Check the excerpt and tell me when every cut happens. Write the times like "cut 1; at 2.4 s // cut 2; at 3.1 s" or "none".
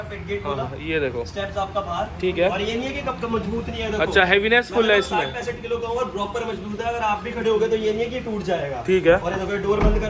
none